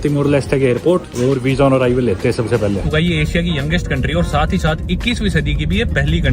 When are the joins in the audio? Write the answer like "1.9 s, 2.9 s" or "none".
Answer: 1.1 s, 2.8 s